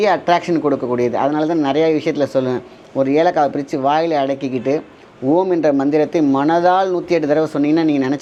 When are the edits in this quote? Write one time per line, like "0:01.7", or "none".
none